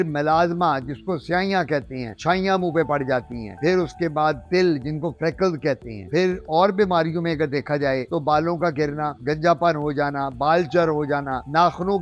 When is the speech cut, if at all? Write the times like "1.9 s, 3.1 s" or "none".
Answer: none